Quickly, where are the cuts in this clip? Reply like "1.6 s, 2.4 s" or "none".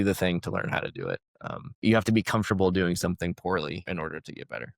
1.8 s, 3.8 s